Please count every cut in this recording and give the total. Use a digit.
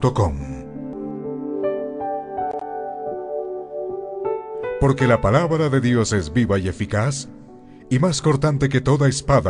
1